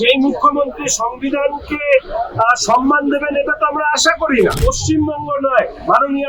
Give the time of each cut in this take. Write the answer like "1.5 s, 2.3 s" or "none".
4.6 s